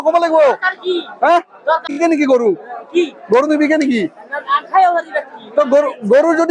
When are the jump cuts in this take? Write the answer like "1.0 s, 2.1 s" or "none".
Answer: 2.0 s